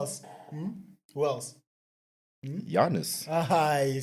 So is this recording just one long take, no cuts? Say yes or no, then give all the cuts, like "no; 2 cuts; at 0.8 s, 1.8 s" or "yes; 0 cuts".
yes; 0 cuts